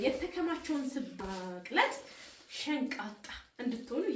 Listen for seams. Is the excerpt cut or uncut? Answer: cut